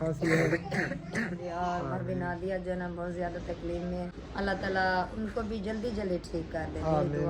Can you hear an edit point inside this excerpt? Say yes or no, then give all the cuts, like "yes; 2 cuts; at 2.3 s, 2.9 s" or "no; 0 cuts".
yes; 2 cuts; at 1.4 s, 4.2 s